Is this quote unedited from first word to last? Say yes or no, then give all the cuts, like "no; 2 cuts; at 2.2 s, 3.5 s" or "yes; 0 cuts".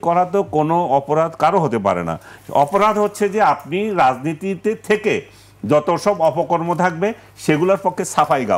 yes; 0 cuts